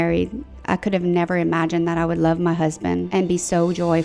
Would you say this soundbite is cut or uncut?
cut